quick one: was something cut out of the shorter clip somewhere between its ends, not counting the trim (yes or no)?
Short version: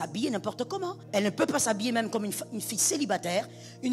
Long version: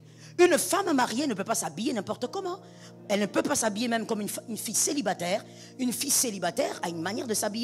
yes